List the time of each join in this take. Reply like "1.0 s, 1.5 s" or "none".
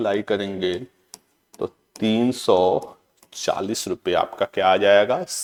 none